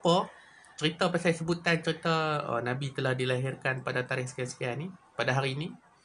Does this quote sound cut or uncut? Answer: uncut